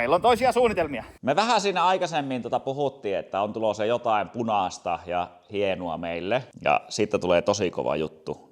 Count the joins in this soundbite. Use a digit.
1